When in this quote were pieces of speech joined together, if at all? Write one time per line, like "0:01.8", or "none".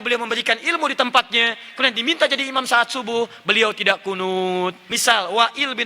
0:04.9